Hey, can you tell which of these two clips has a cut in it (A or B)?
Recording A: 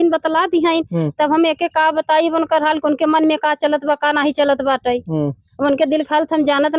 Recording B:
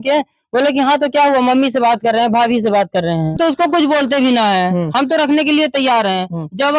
B